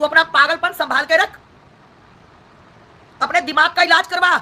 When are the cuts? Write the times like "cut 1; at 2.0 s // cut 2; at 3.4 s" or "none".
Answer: none

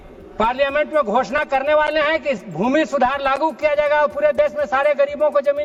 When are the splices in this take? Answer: none

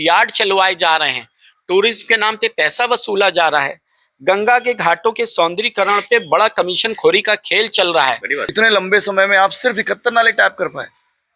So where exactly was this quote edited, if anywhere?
cut 1; at 8.4 s

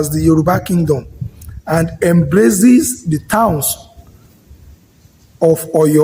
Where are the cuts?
none

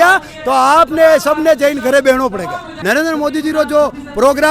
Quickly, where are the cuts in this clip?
cut 1; at 2.7 s

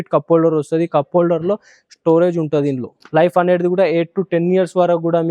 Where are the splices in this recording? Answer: cut 1; at 2.9 s

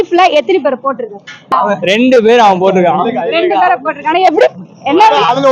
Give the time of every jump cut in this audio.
cut 1; at 1.5 s

